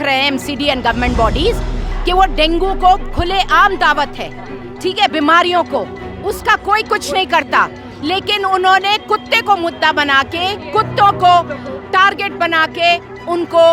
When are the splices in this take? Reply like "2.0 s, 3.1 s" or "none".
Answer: none